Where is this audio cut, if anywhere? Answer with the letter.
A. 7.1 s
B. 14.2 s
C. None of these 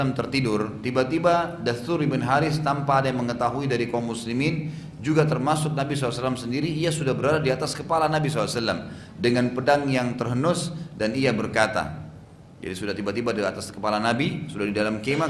C